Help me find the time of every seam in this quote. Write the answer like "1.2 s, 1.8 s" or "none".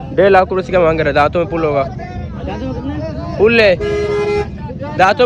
none